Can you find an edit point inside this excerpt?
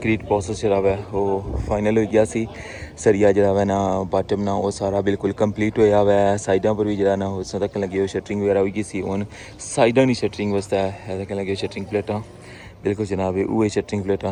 no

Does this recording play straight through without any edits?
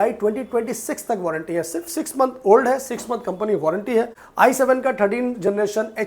no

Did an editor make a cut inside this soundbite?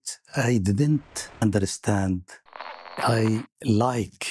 yes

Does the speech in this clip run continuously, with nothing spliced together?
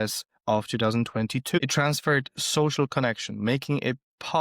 no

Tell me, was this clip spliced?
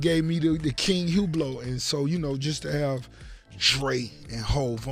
no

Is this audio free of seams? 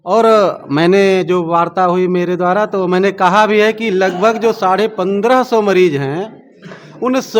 yes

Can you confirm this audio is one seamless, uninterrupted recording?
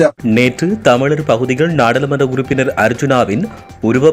yes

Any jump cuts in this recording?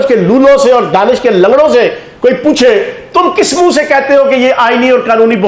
no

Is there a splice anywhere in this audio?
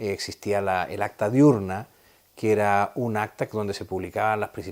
no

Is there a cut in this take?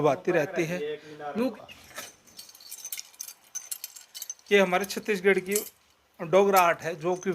yes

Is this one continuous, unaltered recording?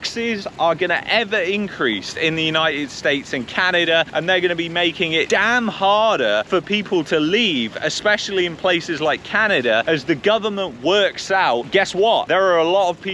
no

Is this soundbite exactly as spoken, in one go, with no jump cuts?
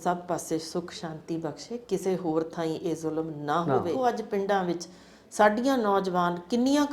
no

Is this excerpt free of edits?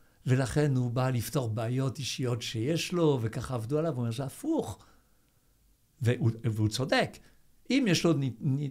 yes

